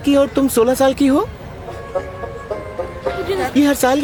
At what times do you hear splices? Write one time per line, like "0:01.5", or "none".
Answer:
none

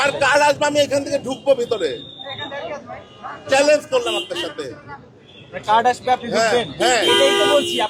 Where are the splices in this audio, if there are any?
none

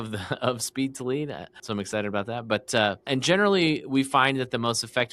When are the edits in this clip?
0:01.6
0:03.1

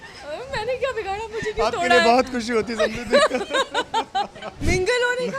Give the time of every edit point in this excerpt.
0:04.4

